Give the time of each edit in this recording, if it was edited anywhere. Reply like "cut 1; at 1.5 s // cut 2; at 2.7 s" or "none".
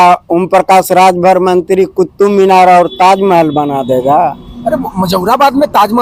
none